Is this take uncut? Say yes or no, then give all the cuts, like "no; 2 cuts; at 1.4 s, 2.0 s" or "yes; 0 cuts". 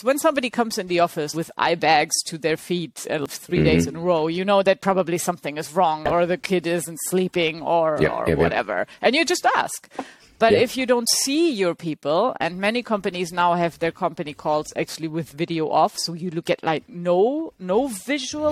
no; 3 cuts; at 1.3 s, 3.2 s, 6.1 s